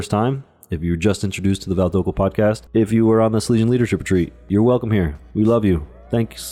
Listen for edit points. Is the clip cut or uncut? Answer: cut